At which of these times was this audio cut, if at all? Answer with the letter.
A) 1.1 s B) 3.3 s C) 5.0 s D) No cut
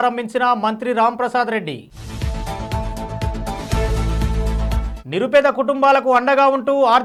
D